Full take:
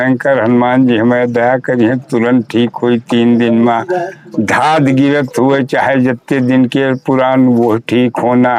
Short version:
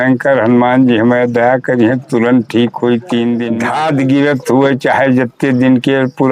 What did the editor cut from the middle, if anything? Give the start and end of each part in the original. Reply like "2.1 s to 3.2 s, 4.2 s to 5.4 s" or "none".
3.6 s to 4.4 s